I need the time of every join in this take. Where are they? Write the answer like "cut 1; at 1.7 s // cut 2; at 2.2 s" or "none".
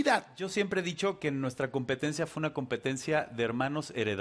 none